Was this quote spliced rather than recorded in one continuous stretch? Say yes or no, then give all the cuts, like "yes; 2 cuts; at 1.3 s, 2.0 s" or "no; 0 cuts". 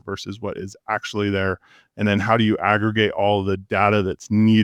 no; 0 cuts